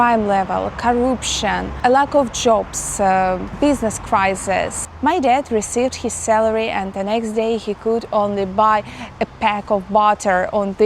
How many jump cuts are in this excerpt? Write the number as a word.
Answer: three